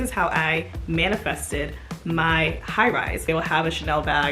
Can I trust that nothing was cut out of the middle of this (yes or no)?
no